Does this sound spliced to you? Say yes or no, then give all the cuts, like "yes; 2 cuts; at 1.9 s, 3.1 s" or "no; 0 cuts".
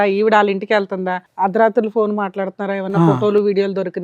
yes; 1 cut; at 1.2 s